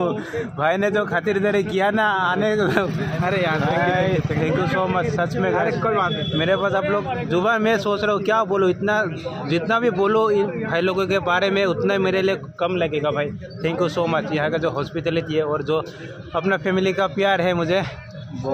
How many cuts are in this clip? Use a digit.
0